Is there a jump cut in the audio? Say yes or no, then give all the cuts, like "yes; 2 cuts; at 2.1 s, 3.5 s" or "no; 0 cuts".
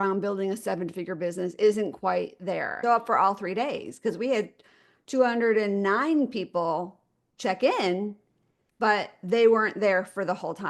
yes; 1 cut; at 2.8 s